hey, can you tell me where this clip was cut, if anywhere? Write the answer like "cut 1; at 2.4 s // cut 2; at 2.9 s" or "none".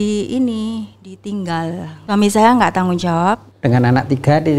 cut 1; at 1.9 s // cut 2; at 3.5 s

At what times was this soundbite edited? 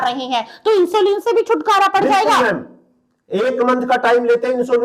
none

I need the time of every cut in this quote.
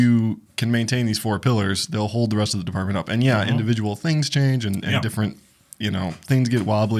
none

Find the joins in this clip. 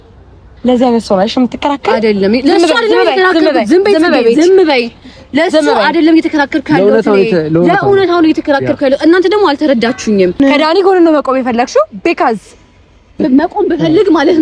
cut 1; at 10.4 s

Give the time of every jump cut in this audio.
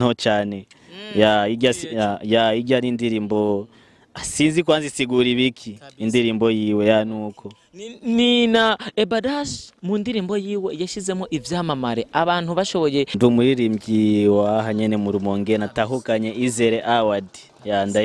cut 1; at 13.2 s

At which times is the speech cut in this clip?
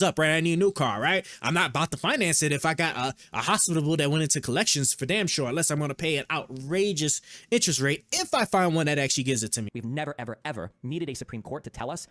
cut 1; at 9.6 s

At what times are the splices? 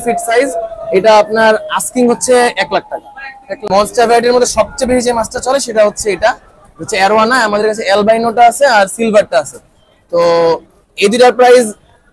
cut 1; at 3.7 s

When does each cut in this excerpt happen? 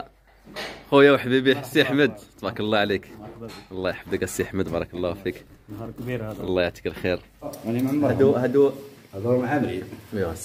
cut 1; at 7.6 s

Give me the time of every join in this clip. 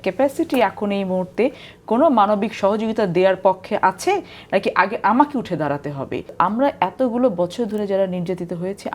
cut 1; at 6.2 s

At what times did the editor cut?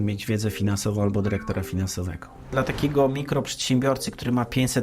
cut 1; at 2.5 s

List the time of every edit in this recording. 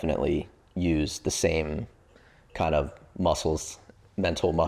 none

